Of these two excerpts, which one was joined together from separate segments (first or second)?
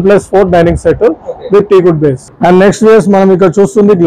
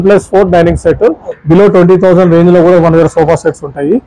second